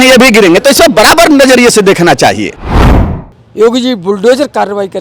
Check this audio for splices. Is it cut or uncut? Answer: cut